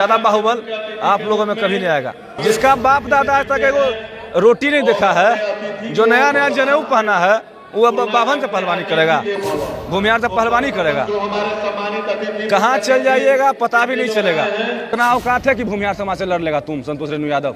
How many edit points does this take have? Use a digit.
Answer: 3